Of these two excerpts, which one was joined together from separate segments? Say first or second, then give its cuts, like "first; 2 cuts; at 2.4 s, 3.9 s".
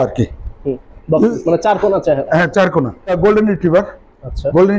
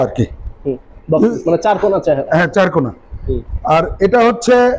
first; 1 cut; at 3.2 s